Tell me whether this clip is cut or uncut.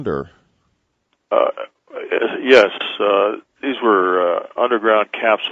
uncut